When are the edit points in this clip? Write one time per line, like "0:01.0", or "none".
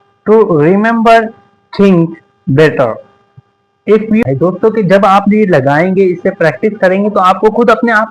0:04.2

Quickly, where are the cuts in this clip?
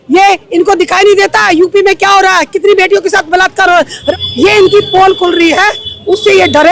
0:04.0

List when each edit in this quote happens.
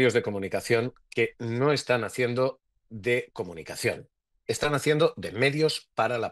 none

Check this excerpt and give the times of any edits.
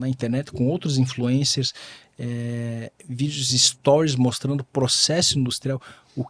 none

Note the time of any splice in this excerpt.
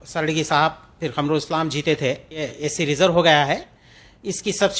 0:02.6

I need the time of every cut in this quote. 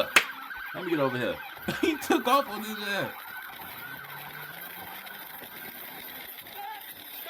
0:04.5

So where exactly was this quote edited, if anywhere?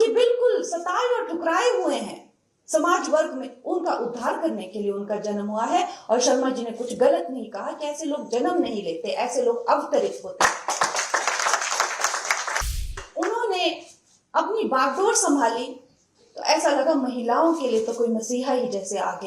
0:13.0

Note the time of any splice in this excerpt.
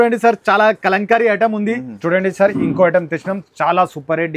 0:01.9

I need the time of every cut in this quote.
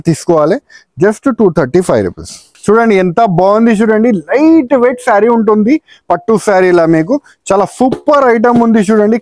0:02.5

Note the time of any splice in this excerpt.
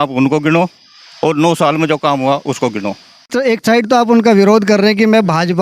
0:03.3

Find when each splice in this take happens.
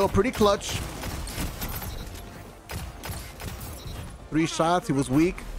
0:02.6

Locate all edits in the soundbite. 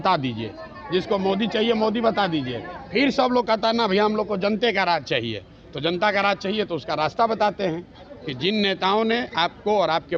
none

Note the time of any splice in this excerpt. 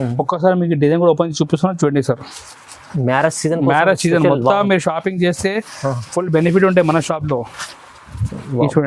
none

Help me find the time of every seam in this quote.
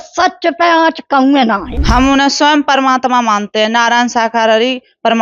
0:01.7

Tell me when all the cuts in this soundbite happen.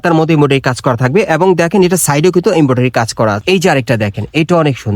0:03.4

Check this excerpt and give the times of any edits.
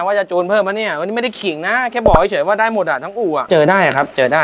0:03.5

